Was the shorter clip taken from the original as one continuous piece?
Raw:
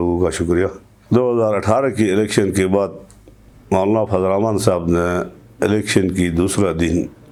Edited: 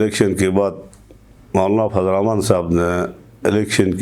yes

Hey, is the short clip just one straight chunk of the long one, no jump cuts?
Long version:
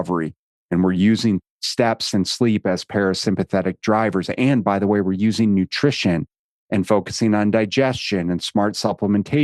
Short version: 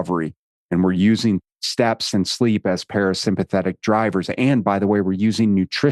yes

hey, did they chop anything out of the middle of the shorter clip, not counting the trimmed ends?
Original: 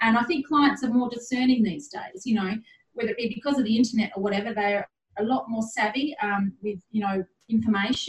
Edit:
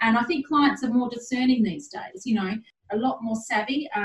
yes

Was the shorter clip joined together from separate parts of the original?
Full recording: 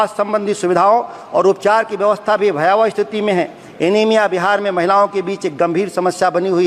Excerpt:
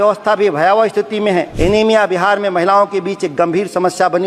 yes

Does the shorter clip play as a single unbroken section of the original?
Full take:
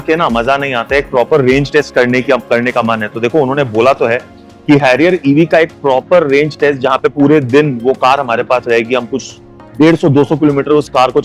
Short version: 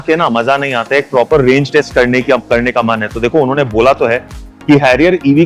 yes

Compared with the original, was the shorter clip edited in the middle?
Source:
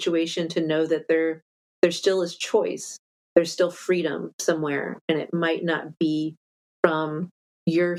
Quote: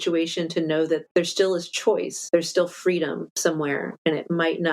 yes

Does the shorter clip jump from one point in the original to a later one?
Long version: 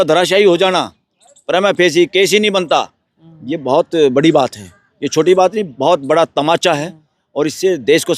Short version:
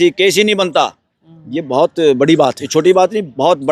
yes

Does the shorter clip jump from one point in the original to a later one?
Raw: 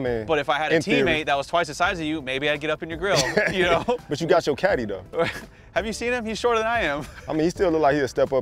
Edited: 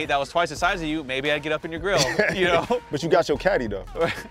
no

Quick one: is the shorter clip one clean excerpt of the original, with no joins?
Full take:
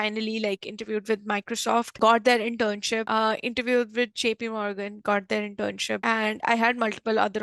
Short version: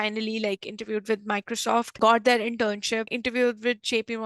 no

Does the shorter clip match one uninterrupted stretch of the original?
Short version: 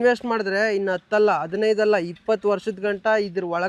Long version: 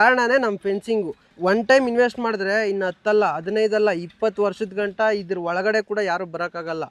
yes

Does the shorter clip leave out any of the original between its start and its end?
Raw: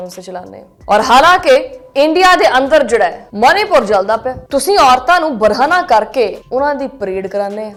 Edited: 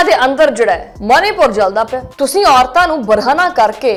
no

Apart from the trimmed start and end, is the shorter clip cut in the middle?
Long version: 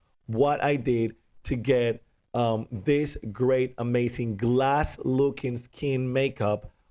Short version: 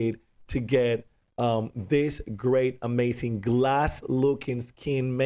no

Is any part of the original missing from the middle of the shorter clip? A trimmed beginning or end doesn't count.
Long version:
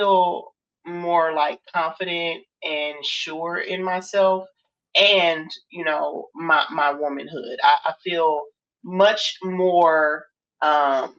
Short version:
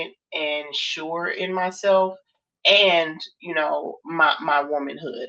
no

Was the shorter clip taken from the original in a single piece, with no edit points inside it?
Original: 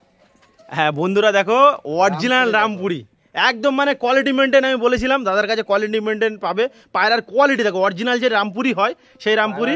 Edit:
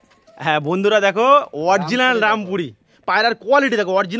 no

